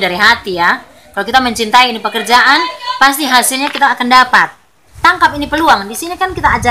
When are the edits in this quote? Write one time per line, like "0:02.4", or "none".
0:04.8